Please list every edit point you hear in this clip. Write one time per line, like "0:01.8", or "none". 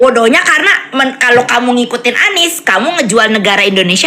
none